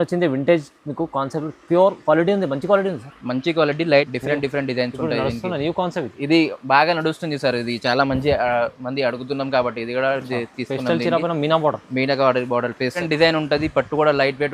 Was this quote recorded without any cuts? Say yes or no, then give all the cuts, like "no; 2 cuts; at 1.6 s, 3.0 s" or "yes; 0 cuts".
no; 2 cuts; at 4.1 s, 13.0 s